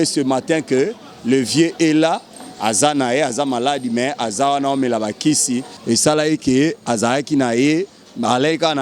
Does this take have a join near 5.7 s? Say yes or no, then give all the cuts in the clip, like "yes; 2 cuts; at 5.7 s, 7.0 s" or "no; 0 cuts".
yes; 1 cut; at 5.7 s